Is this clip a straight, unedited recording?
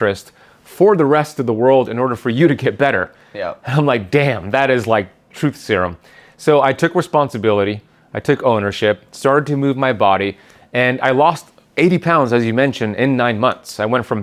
yes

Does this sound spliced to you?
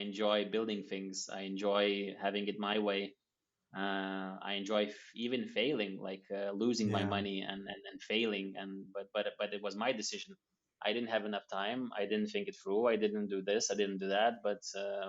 no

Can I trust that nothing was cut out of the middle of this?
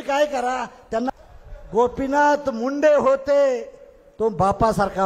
no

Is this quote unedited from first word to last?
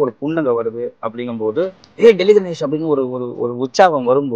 no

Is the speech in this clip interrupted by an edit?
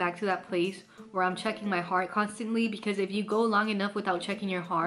no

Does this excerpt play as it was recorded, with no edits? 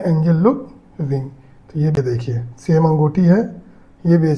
no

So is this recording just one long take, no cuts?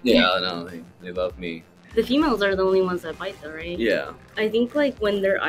no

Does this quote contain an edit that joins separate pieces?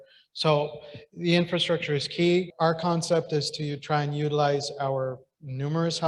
yes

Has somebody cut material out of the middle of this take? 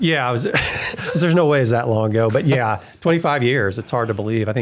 no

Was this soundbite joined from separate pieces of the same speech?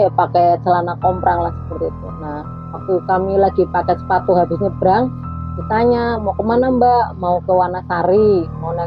no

